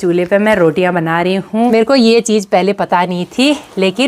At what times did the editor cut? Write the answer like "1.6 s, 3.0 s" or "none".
1.7 s

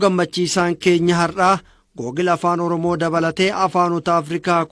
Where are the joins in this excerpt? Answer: none

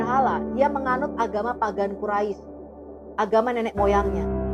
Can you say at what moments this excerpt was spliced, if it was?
none

